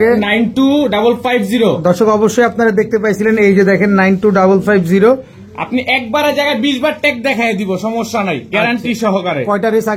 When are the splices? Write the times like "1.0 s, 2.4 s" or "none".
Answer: none